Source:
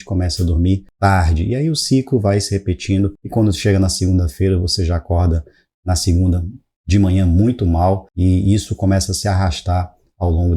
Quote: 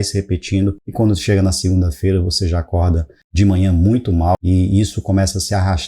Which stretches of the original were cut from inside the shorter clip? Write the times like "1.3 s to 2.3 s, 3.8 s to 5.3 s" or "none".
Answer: 5.5 s to 6.7 s, 7.9 s to 8.1 s